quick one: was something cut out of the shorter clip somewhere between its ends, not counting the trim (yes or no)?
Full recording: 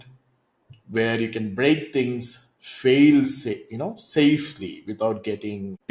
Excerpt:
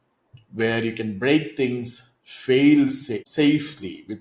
yes